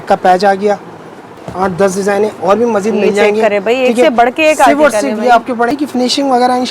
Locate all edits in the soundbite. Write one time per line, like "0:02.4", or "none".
0:01.4
0:05.7